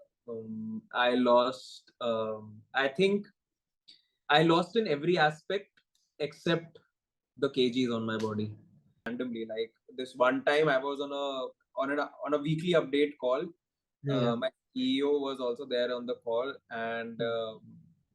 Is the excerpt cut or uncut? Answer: cut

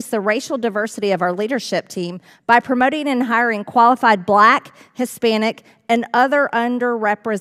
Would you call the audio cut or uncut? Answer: uncut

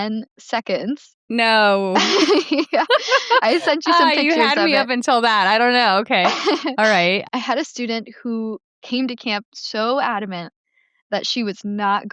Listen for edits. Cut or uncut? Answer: cut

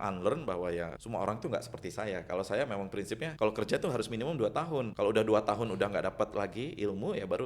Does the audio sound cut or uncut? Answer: cut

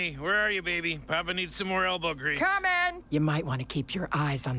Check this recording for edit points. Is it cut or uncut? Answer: uncut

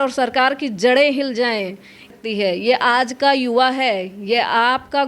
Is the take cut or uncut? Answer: cut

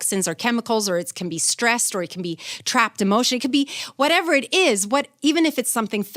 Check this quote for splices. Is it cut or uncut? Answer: uncut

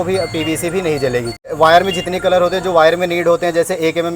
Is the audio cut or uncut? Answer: cut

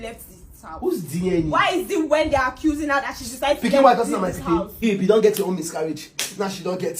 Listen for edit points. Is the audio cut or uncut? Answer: cut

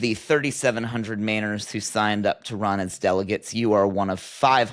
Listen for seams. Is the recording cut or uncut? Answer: uncut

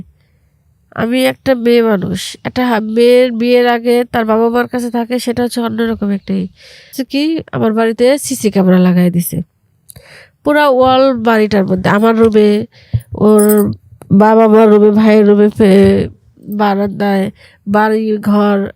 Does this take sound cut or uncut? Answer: cut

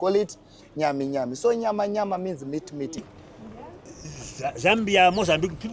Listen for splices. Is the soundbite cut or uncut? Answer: cut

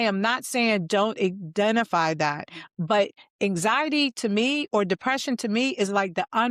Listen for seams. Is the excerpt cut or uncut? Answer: uncut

